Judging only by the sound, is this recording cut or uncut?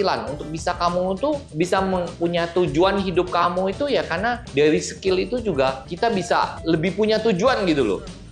uncut